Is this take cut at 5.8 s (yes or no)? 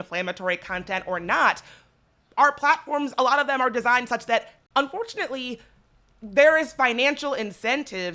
no